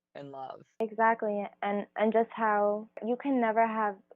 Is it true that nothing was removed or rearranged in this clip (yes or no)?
no